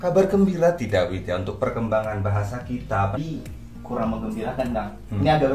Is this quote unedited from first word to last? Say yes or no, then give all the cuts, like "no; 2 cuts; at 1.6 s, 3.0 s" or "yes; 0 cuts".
no; 1 cut; at 3.2 s